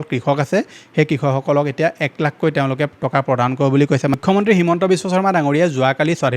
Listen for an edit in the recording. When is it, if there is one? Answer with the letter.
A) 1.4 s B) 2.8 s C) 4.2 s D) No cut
C